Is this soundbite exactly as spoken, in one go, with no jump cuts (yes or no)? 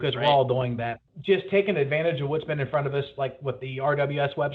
no